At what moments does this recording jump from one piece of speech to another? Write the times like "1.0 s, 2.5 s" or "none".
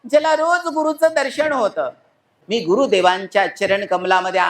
2.3 s